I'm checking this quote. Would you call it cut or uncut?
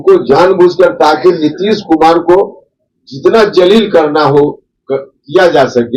uncut